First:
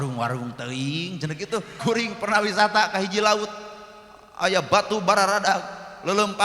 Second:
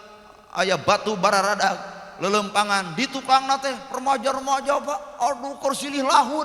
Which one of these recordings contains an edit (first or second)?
first